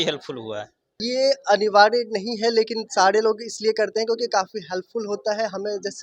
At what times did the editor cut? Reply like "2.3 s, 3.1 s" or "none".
1.0 s